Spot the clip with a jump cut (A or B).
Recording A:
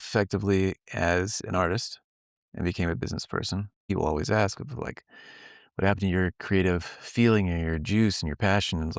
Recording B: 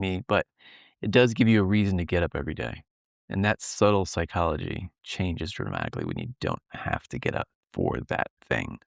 A